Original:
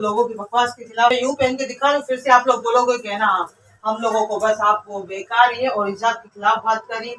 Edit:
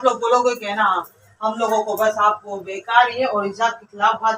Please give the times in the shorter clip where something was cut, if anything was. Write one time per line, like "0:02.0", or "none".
none

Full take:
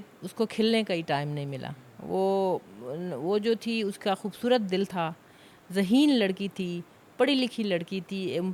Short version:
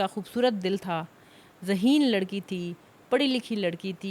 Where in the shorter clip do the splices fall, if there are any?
none

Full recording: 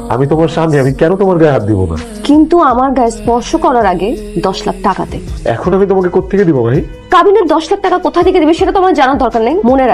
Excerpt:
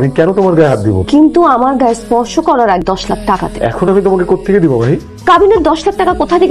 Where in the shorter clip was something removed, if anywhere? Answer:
0:01.0
0:03.2

